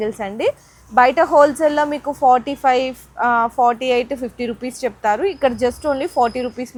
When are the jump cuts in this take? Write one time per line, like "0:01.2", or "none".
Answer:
none